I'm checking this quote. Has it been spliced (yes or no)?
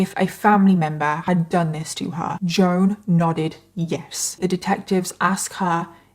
yes